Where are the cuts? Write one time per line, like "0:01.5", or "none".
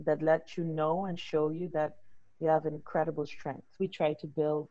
0:03.8